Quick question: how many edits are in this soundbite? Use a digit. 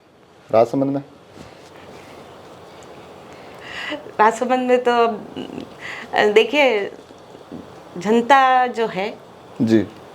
0